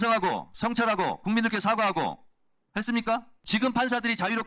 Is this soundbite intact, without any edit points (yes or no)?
no